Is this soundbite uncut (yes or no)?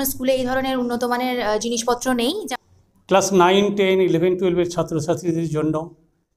no